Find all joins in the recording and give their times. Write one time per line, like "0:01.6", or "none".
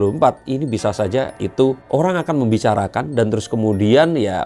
none